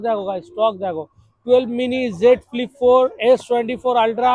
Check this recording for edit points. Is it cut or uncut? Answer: uncut